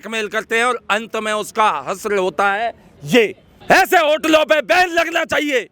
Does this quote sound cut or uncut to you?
cut